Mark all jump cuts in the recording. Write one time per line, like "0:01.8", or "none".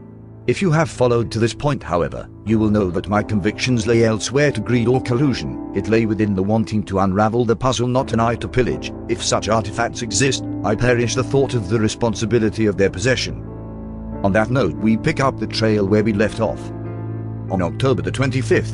0:06.4